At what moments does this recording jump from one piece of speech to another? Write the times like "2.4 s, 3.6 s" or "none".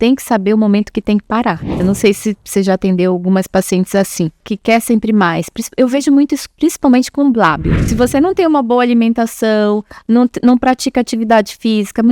1.8 s, 4.5 s, 7.8 s